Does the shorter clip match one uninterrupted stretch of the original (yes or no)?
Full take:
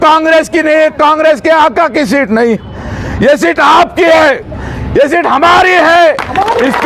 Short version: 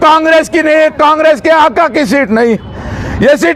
yes